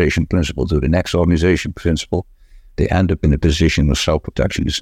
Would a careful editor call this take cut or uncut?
uncut